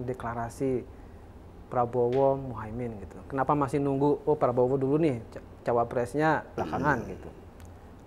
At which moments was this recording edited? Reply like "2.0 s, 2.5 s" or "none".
none